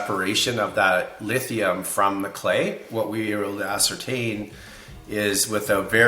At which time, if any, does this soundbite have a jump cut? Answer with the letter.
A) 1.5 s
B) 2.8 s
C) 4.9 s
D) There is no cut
B